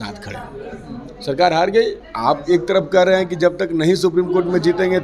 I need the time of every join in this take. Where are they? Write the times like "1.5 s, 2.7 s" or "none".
2.1 s